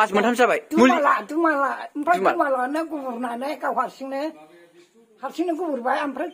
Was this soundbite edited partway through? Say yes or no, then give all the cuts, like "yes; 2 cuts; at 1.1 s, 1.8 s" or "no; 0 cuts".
no; 0 cuts